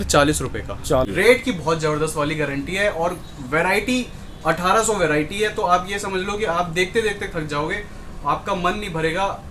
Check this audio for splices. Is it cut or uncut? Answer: cut